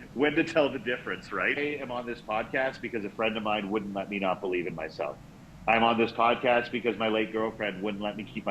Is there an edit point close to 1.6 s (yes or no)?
yes